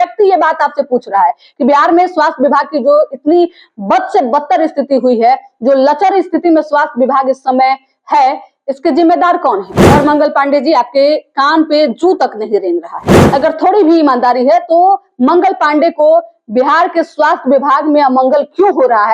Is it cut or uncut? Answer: cut